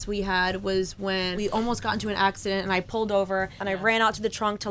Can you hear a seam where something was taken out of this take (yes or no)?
yes